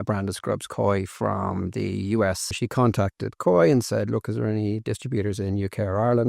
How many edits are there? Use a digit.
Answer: 1